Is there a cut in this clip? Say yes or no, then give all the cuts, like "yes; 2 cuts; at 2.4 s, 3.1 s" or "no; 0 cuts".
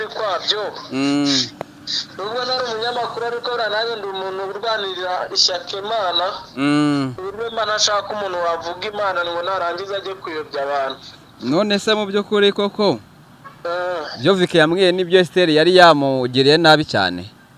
no; 0 cuts